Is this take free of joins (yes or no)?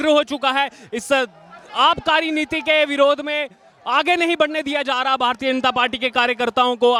yes